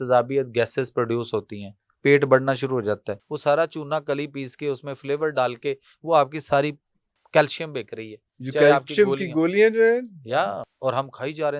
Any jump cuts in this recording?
yes; 2 cuts; at 3.2 s, 10.6 s

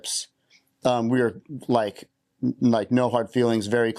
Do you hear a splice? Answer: no; 0 cuts

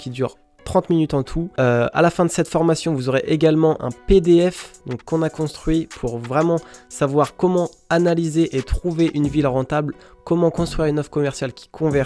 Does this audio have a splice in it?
yes; 1 cut; at 1.4 s

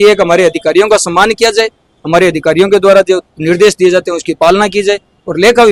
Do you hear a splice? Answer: no; 0 cuts

